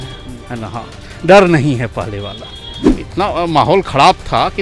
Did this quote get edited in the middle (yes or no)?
yes